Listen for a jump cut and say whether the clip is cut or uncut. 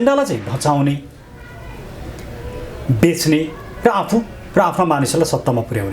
uncut